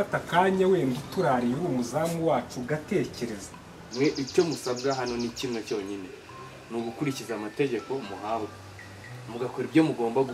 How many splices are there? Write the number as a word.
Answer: one